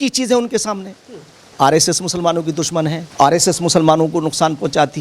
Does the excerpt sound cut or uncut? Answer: cut